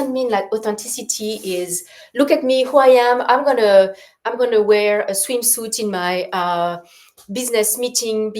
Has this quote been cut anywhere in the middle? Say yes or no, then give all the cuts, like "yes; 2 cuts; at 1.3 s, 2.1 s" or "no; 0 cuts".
no; 0 cuts